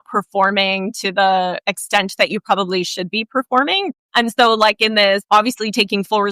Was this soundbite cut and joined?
yes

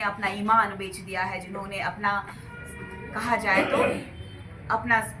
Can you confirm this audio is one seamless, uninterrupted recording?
yes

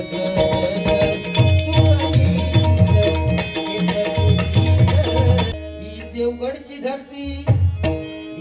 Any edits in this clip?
yes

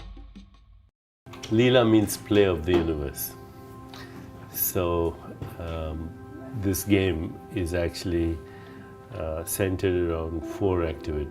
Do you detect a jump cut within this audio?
yes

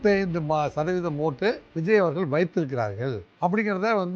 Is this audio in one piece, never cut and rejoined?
no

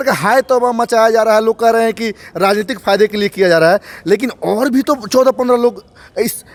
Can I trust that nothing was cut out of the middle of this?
yes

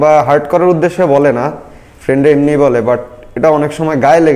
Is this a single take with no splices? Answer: yes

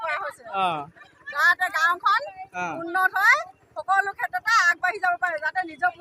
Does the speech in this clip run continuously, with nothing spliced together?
no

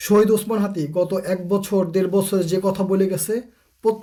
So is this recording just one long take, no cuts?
yes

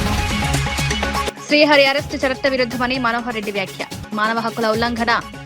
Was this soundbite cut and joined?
yes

